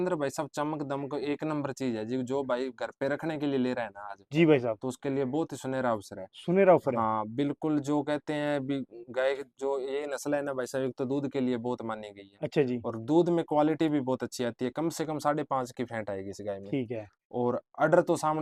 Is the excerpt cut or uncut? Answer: uncut